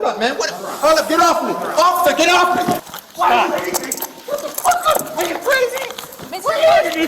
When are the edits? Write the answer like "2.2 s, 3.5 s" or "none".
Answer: 2.8 s